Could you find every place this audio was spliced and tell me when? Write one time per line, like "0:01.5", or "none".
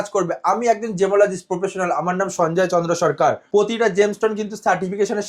0:03.4